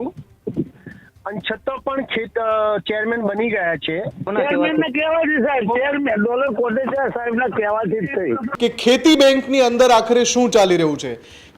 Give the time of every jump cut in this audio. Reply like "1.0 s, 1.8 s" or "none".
4.3 s, 8.5 s